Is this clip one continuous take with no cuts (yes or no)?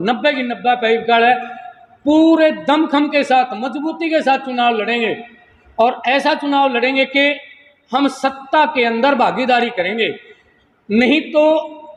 yes